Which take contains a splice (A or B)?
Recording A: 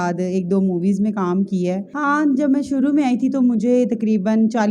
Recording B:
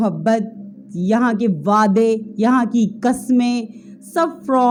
A